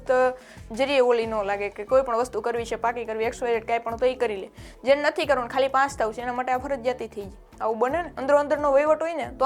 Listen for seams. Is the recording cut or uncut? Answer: cut